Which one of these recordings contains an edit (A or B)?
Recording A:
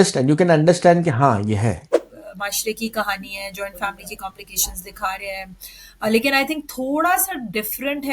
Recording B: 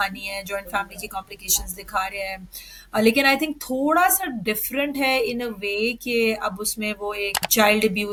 A